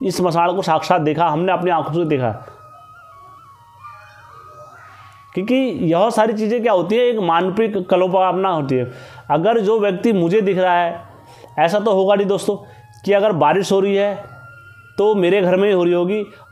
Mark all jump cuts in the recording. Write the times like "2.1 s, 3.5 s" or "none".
none